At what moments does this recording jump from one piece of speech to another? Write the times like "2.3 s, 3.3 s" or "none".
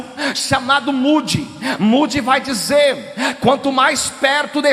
none